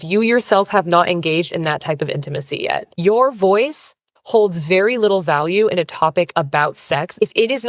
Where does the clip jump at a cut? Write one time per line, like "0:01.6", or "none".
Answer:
none